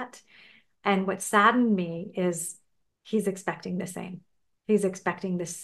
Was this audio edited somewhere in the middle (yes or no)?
no